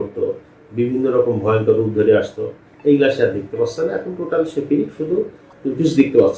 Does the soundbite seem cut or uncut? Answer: cut